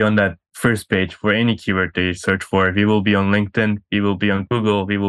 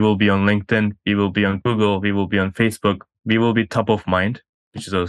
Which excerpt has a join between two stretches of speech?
second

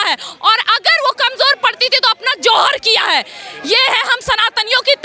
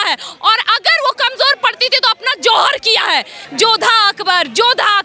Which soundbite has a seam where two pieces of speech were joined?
second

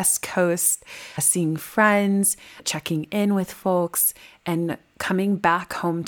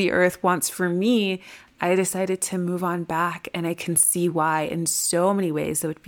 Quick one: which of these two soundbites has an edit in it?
first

